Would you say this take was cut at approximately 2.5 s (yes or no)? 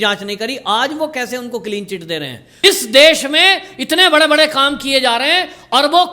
yes